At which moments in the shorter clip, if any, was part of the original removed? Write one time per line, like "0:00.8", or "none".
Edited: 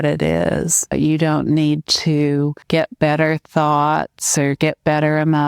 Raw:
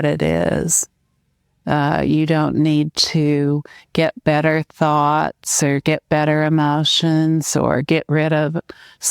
0:00.9
0:02.6